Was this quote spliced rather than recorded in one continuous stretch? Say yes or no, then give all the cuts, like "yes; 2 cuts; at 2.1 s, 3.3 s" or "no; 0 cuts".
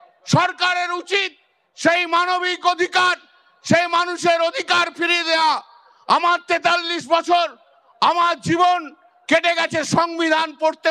no; 0 cuts